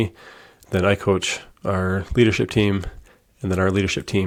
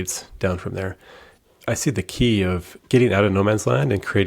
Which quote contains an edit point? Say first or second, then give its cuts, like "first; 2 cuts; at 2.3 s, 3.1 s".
second; 2 cuts; at 1.3 s, 2.7 s